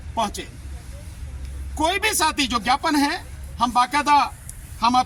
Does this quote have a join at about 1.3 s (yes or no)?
no